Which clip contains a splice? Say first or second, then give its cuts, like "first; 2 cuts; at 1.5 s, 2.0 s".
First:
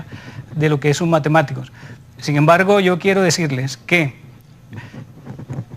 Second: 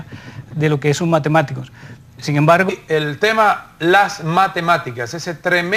first; 1 cut; at 2.7 s